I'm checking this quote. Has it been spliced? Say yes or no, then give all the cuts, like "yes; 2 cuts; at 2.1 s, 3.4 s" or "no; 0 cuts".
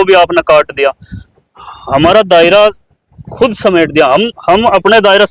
no; 0 cuts